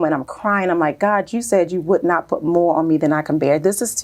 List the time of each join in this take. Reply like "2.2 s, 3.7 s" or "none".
none